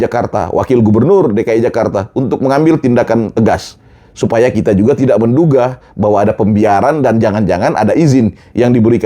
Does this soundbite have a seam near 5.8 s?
no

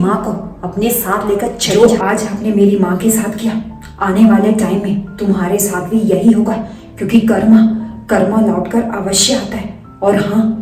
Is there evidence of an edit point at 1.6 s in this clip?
yes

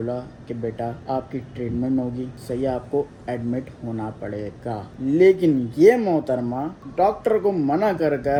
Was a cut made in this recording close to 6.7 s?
no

